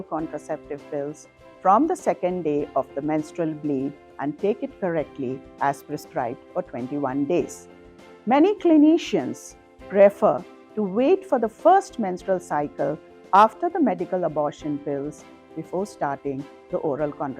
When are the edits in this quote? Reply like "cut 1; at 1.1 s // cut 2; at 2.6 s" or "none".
none